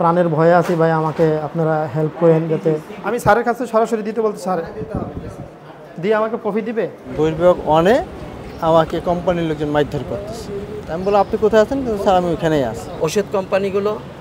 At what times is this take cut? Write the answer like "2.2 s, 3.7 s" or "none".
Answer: 2.9 s, 7.0 s, 12.8 s